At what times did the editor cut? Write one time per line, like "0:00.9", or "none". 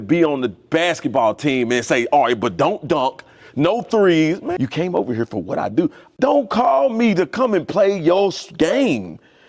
0:04.5
0:06.0